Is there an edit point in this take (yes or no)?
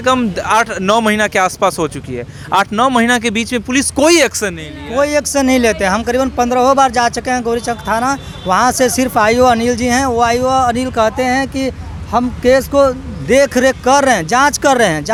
no